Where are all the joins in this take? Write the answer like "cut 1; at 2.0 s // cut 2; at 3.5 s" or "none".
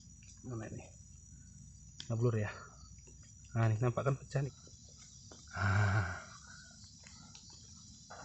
cut 1; at 4.5 s